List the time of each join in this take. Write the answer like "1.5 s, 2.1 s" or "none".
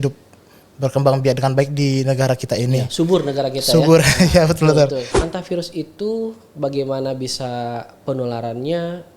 5.1 s